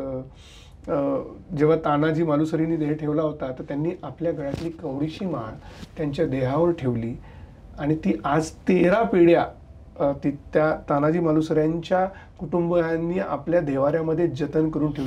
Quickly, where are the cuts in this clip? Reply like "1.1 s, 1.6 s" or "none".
none